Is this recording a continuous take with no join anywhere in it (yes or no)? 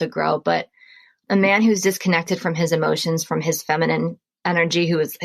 yes